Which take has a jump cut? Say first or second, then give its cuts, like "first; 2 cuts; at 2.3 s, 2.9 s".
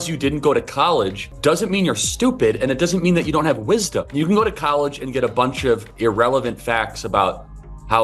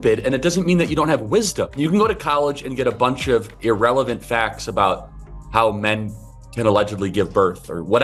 first; 1 cut; at 1.2 s